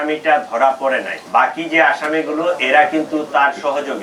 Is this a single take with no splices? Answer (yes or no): yes